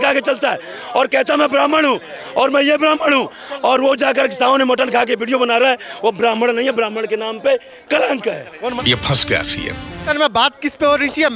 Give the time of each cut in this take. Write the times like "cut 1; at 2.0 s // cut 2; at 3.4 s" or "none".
cut 1; at 8.8 s // cut 2; at 9.9 s